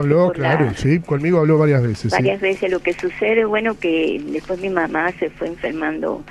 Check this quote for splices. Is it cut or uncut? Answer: uncut